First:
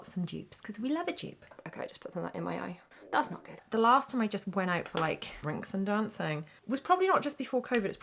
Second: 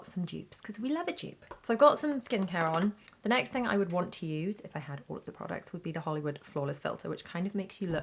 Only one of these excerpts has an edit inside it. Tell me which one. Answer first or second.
first